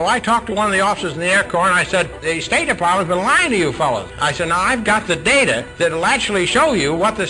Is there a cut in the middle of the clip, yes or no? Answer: yes